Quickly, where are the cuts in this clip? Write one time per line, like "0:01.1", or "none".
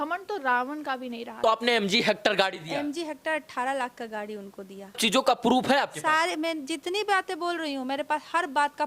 0:01.4
0:05.0

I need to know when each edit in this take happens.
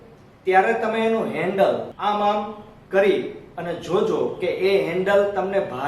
0:01.9

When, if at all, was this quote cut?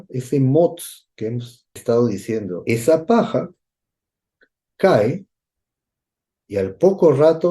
0:02.6

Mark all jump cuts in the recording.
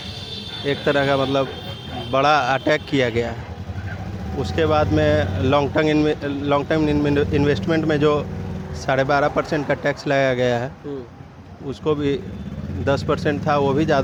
none

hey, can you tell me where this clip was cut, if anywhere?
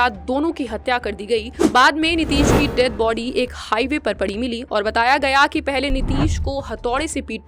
0:01.6

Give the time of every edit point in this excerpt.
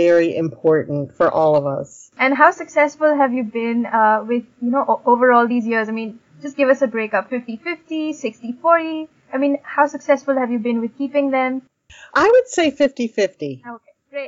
none

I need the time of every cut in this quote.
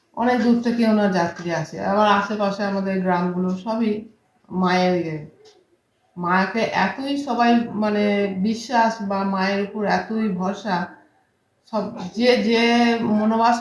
none

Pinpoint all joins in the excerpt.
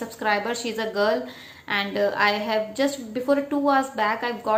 none

